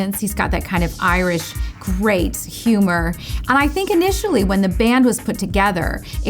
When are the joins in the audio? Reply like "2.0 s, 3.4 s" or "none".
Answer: 3.3 s

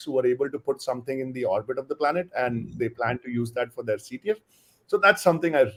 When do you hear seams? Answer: none

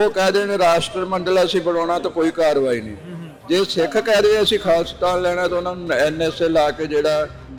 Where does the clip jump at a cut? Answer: none

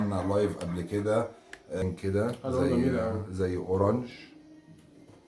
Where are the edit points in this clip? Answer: 1.8 s

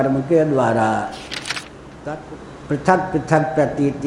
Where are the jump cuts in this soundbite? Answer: 2.4 s

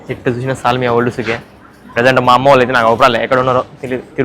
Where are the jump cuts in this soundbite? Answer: none

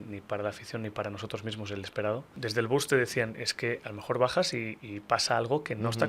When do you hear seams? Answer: 2.3 s

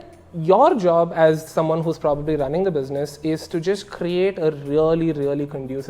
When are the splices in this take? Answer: none

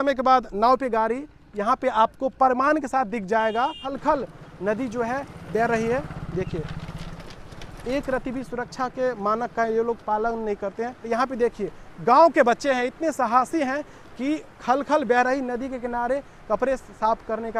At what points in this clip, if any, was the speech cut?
3.9 s, 11.0 s

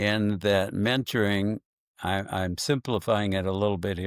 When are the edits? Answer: none

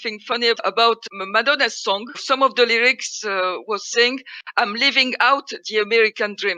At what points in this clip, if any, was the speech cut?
none

